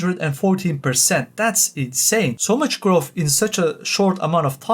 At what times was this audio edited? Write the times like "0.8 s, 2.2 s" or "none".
2.4 s